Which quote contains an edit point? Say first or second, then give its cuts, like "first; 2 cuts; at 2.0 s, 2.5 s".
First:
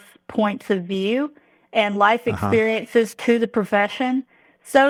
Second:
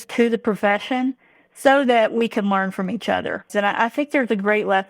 second; 1 cut; at 3.8 s